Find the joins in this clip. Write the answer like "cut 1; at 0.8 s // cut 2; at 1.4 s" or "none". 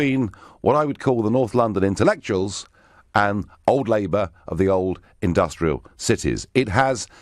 none